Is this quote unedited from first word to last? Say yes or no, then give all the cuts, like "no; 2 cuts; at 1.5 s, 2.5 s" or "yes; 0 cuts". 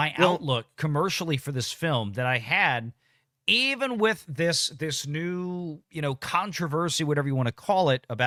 yes; 0 cuts